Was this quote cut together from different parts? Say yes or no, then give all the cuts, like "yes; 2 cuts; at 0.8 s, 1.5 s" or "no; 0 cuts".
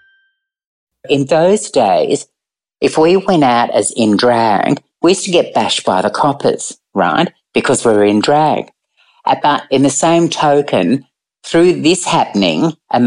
yes; 1 cut; at 1.1 s